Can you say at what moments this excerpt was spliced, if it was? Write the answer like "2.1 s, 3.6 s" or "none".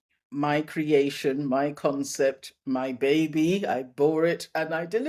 none